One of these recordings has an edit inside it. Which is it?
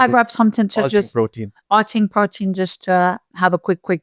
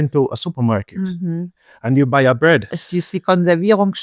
second; 1 cut; at 2.8 s

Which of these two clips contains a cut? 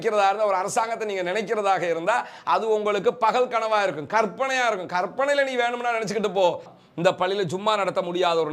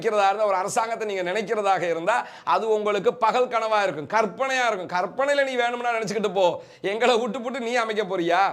first; 1 cut; at 6.7 s

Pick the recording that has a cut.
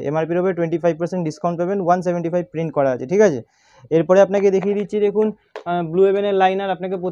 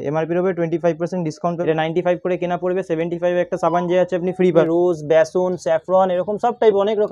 second; 2 cuts; at 1.6 s, 4.7 s

